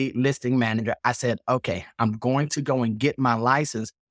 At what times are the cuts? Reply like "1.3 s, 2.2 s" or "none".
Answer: none